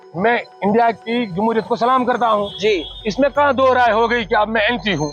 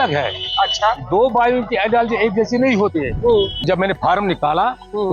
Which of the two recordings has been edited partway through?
second; 1 cut; at 3.6 s

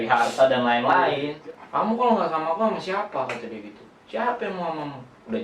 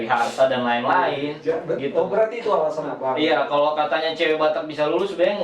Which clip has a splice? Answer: first; 1 cut; at 1.3 s

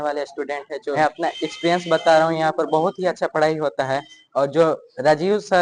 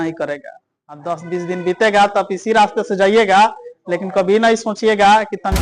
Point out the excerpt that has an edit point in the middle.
first; 1 cut; at 0.9 s

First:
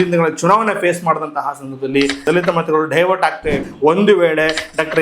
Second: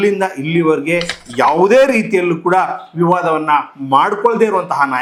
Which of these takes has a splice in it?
first; 2 cuts; at 2.2 s, 3.6 s

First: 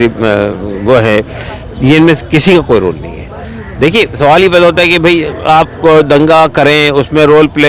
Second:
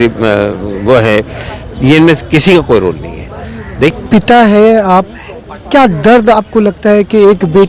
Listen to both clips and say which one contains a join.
second; 1 cut; at 3.9 s

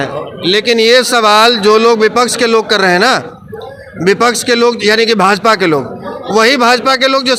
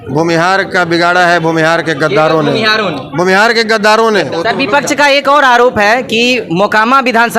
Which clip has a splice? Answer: second; 1 cut; at 4.3 s

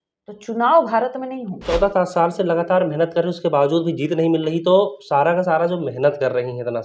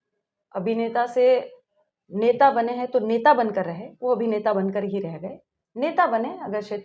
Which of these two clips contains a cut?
first; 1 cut; at 1.6 s

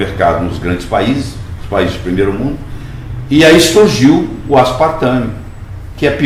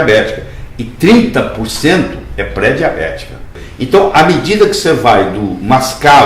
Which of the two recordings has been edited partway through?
second; 1 cut; at 3.6 s

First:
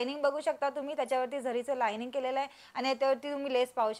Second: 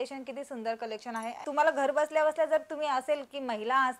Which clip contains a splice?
second; 1 cut; at 1.4 s

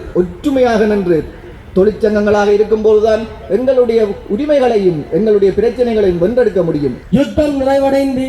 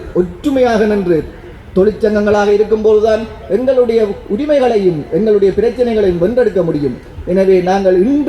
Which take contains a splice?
first; 1 cut; at 7.0 s

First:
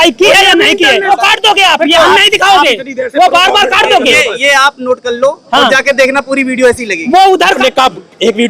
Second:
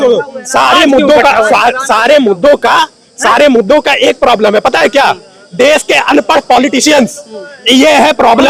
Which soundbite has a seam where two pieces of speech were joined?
first; 2 cuts; at 1.1 s, 7.6 s

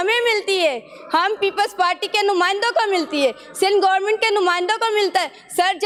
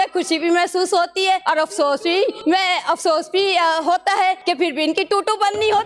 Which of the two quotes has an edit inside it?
second; 3 cuts; at 1.4 s, 2.4 s, 4.4 s

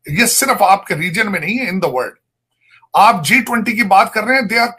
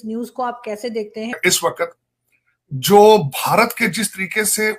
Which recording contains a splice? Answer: second; 1 cut; at 1.3 s

